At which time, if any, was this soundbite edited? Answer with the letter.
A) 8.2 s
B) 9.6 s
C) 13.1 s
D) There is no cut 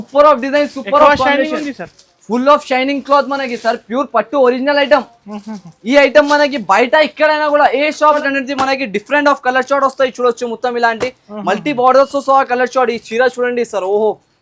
A